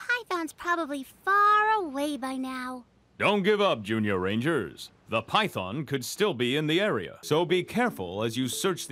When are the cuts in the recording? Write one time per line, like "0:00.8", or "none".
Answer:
0:07.1

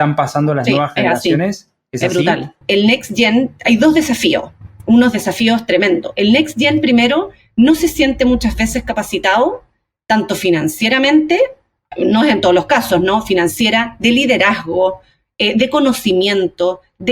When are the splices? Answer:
0:02.6

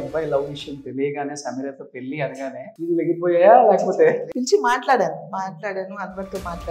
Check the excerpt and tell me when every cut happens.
0:02.7
0:04.3

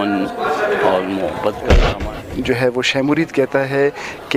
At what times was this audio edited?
0:01.9

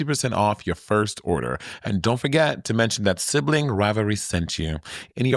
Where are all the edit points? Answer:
none

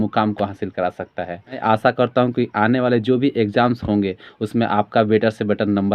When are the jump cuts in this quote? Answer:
0:01.6

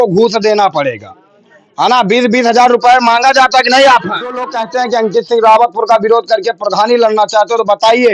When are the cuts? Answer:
0:04.6

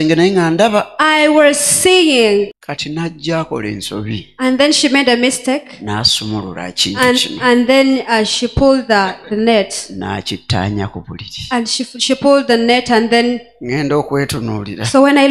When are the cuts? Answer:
0:02.6

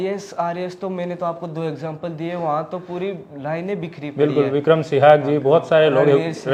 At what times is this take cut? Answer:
none

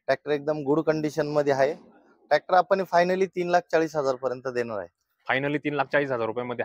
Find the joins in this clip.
none

